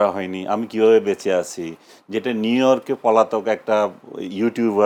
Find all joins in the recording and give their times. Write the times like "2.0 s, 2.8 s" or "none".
none

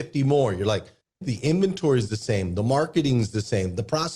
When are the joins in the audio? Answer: 1.2 s

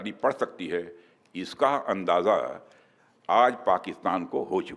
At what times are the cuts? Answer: none

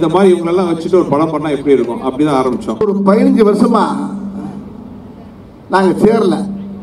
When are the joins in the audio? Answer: 2.8 s

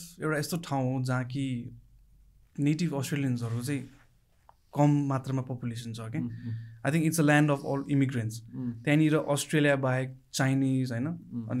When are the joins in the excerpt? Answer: none

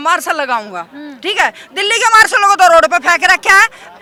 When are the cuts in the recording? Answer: none

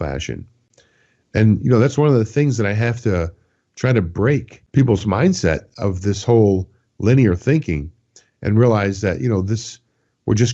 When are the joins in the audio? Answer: none

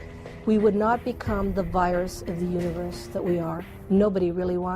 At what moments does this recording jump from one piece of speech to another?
1.0 s

